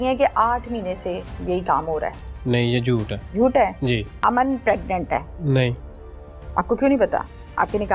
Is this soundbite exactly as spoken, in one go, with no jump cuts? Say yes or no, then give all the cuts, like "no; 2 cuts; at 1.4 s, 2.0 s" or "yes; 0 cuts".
no; 3 cuts; at 3.2 s, 4.1 s, 5.3 s